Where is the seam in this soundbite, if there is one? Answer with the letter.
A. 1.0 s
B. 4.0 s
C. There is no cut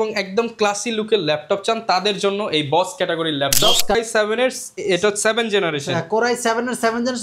B